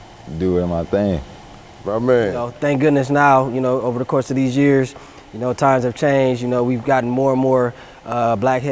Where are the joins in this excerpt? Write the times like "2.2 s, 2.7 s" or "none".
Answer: 2.5 s